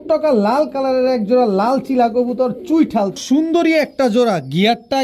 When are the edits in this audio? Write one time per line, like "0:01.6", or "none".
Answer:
0:03.2